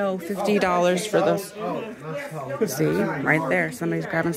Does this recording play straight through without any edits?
yes; 0 cuts

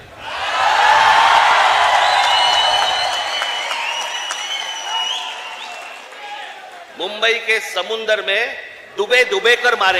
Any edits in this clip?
no; 0 cuts

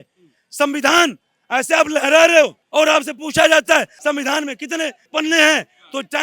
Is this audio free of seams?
no; 3 cuts; at 2.6 s, 3.9 s, 5.0 s

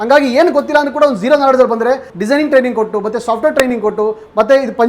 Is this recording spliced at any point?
yes; 1 cut; at 2.1 s

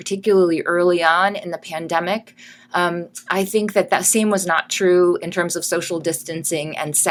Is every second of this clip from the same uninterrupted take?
yes; 0 cuts

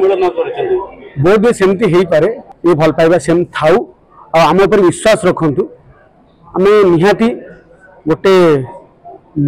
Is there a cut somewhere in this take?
yes; 1 cut; at 2.4 s

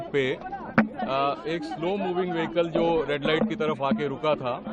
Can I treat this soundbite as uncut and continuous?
yes; 0 cuts

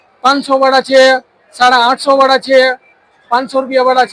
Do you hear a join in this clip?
no; 0 cuts

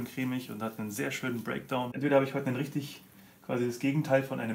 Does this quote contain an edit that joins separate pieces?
yes; 1 cut; at 1.9 s

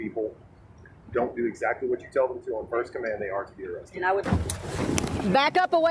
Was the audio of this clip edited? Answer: yes; 1 cut; at 4.2 s

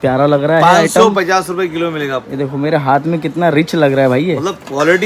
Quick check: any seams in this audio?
no; 0 cuts

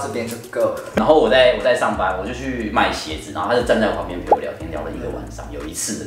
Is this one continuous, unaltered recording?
no; 1 cut; at 1.0 s

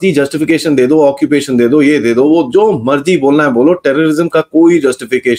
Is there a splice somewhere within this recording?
no; 0 cuts

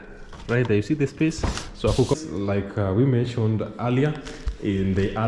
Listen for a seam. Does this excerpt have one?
yes; 1 cut; at 2.1 s

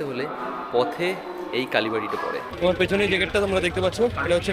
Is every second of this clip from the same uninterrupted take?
no; 1 cut; at 2.5 s

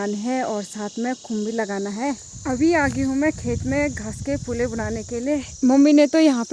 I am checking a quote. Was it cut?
no; 0 cuts

